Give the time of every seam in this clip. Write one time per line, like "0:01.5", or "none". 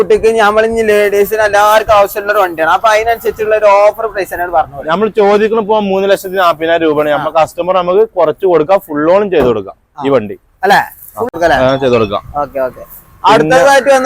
0:11.3

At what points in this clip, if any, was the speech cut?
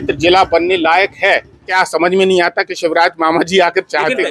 0:01.7

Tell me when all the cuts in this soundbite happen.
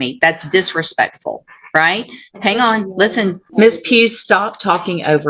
0:03.4

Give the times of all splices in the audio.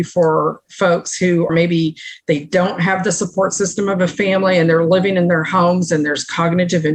none

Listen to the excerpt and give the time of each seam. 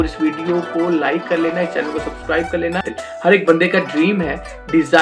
0:03.0

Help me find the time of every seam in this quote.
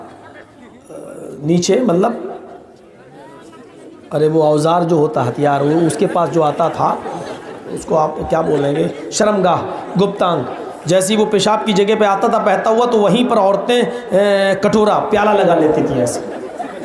none

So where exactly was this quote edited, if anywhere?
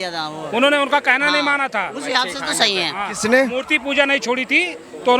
none

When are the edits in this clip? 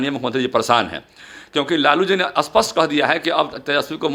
none

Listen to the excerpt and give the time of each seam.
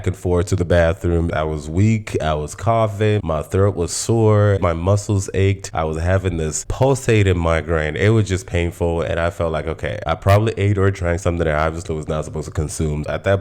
0:01.3
0:04.6
0:05.6
0:10.0

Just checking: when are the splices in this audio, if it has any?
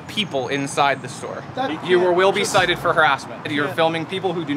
0:01.8
0:03.5

